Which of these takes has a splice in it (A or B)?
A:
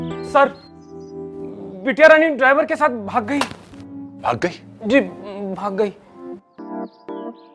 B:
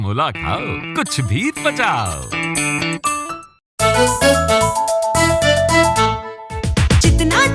B